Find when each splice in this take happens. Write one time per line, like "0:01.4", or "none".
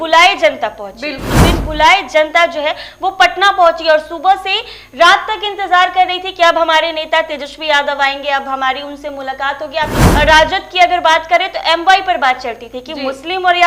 0:01.3
0:10.0